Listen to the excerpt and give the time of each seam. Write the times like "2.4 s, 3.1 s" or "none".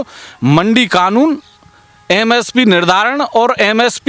none